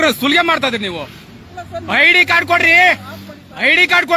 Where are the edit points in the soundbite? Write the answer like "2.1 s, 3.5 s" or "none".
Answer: none